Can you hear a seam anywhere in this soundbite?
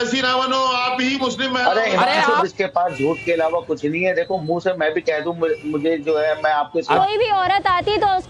yes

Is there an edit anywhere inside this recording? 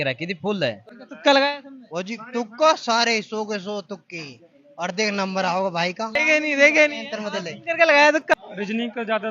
yes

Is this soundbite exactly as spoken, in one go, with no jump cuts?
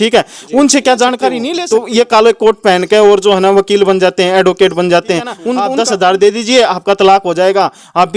no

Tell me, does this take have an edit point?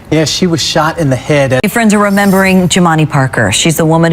yes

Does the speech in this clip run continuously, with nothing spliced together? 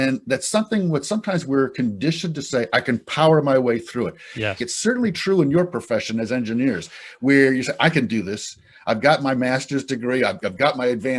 no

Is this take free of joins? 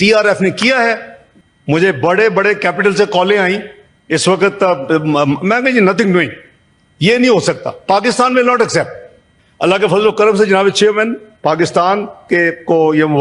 yes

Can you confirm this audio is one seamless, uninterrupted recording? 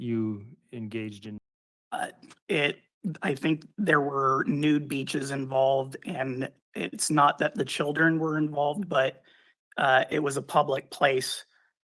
no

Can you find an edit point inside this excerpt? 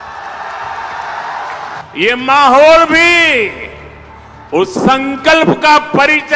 yes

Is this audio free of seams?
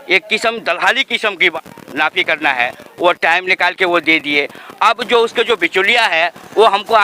no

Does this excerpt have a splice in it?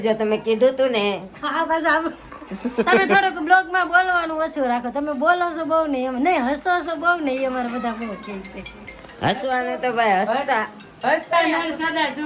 no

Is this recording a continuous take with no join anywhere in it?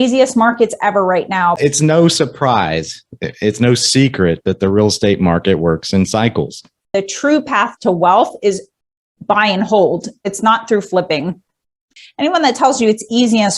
no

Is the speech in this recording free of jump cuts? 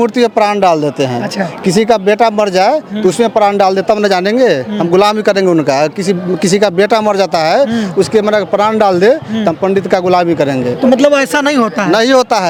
yes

